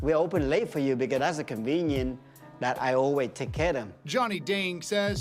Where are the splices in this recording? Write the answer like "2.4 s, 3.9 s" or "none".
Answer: none